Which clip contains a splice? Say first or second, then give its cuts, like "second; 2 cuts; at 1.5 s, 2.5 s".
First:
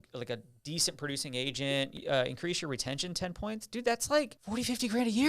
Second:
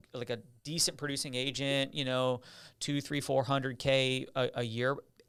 first; 2 cuts; at 2.0 s, 4.4 s